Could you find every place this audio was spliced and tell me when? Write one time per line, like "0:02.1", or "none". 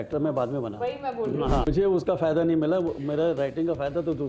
0:01.7